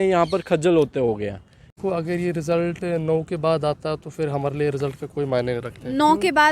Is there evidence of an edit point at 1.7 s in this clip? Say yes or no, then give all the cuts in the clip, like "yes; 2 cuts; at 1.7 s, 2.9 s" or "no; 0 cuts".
yes; 1 cut; at 1.7 s